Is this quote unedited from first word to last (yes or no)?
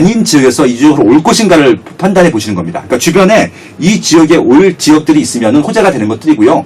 yes